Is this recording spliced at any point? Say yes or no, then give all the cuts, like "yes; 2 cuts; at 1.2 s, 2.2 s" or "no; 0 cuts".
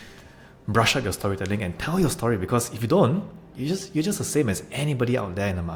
no; 0 cuts